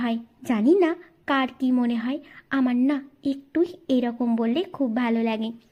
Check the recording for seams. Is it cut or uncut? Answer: uncut